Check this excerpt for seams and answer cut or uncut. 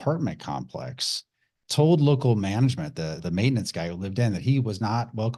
uncut